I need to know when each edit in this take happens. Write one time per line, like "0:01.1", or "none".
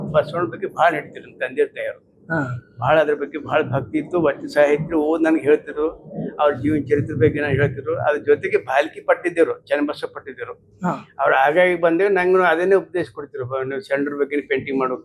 none